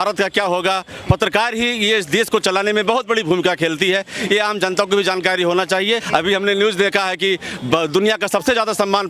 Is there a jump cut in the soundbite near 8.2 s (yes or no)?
no